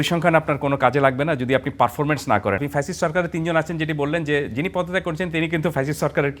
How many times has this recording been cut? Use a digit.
1